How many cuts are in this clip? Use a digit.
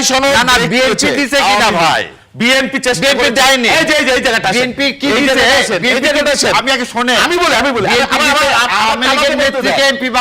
0